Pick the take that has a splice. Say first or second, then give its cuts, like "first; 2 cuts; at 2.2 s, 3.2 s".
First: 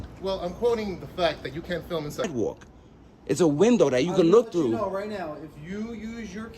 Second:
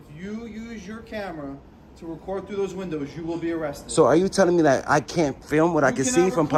first; 1 cut; at 2.2 s